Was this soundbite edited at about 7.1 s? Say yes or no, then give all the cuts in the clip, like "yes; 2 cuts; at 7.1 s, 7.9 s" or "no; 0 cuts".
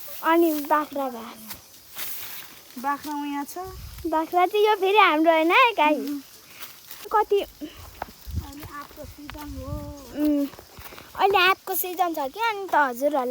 yes; 1 cut; at 7.1 s